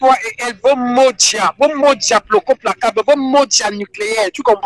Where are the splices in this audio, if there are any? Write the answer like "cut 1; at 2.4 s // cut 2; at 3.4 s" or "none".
none